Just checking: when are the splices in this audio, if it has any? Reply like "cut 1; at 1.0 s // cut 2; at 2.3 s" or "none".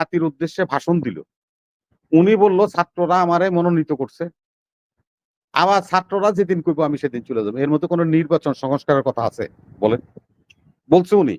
none